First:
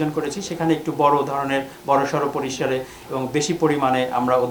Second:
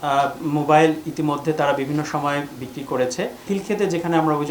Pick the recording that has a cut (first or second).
second